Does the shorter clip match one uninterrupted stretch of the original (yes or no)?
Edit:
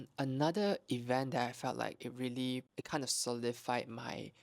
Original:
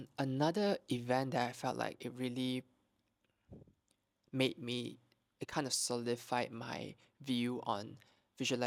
no